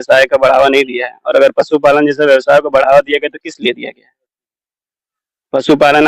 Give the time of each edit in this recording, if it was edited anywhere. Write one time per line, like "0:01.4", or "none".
none